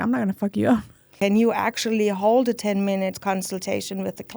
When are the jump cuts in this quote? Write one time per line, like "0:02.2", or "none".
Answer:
0:01.0